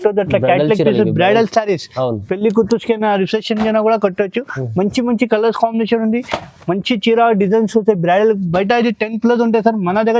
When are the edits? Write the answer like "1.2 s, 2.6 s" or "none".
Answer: none

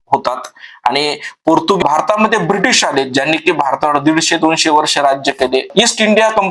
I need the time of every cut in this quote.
1.8 s

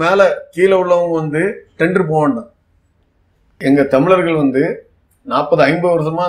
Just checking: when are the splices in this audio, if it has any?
3.6 s

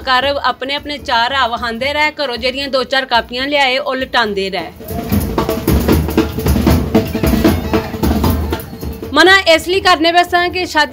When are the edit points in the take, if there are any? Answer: 4.9 s

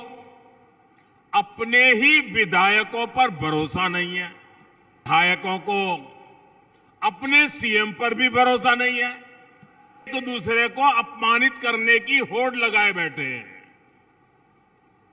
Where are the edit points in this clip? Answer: 5.0 s, 10.1 s

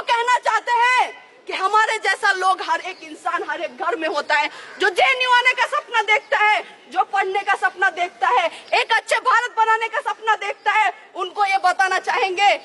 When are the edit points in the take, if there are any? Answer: none

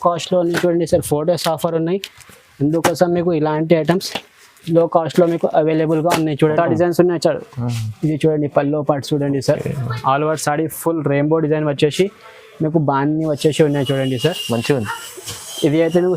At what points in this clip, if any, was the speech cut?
6.5 s

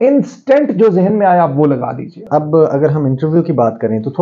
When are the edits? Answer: 2.2 s

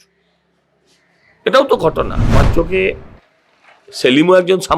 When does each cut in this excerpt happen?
2.4 s

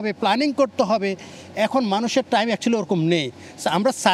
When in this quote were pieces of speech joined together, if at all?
none

